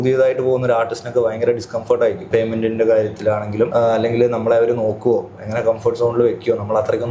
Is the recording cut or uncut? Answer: cut